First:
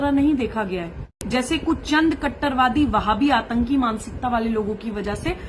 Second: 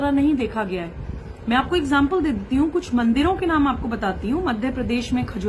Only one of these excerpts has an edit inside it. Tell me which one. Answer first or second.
first